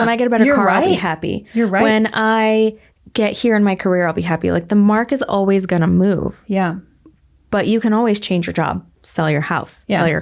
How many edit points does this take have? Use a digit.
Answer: 0